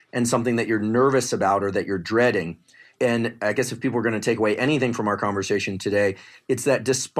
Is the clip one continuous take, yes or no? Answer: no